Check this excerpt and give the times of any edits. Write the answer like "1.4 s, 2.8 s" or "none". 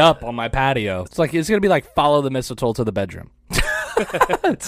1.1 s